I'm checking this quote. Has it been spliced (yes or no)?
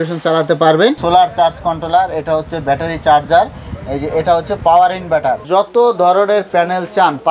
yes